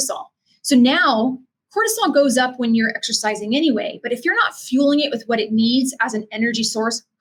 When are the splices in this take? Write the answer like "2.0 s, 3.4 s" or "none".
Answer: none